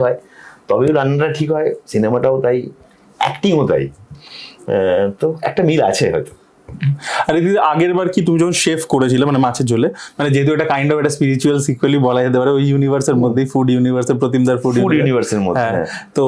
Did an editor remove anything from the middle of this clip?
no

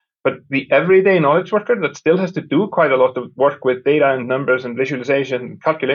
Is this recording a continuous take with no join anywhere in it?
yes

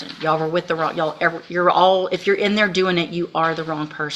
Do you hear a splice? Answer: no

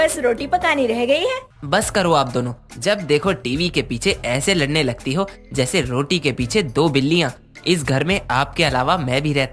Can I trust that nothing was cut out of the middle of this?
no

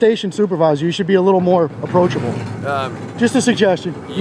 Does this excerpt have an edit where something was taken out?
no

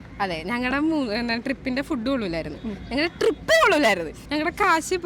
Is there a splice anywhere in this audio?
yes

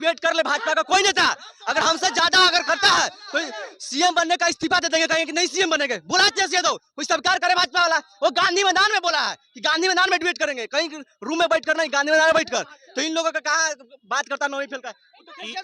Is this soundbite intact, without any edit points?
yes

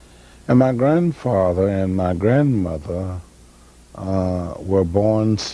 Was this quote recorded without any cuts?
yes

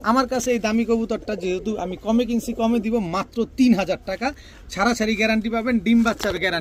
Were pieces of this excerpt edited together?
no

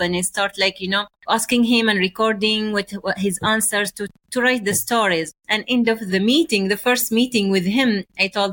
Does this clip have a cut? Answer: yes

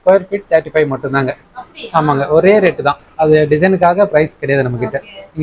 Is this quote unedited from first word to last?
yes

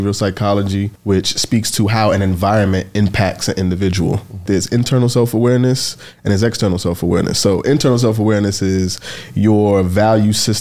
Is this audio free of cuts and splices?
no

